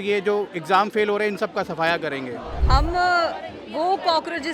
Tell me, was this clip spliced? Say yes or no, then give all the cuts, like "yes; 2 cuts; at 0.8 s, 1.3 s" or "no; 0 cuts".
yes; 1 cut; at 2.5 s